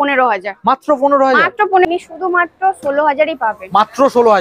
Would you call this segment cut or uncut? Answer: cut